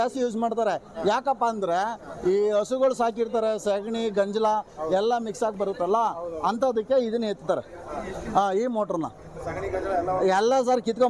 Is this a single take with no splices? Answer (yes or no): yes